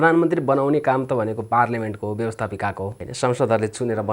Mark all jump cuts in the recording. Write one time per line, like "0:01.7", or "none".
0:03.0